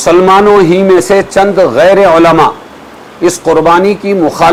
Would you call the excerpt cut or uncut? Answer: uncut